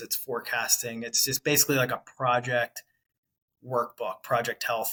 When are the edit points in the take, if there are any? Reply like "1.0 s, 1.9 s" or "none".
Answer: none